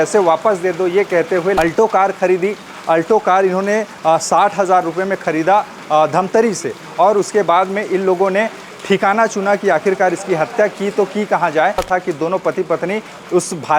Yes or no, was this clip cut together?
yes